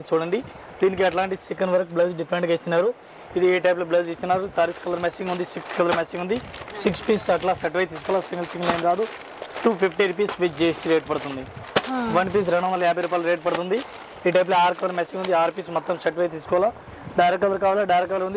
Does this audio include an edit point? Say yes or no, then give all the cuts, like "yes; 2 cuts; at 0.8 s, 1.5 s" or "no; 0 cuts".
no; 0 cuts